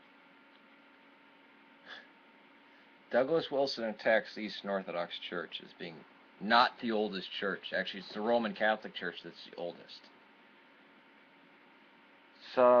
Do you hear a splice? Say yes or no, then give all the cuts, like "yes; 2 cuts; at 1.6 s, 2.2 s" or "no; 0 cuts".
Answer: yes; 1 cut; at 1.7 s